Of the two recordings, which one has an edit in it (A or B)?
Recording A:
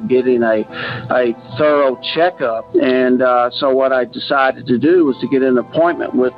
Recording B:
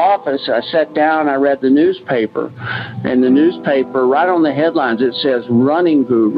A